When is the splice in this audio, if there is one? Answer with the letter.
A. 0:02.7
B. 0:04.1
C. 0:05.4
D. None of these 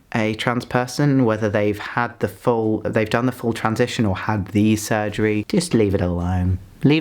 C